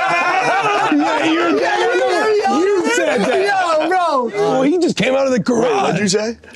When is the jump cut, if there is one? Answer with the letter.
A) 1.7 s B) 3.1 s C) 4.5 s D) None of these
C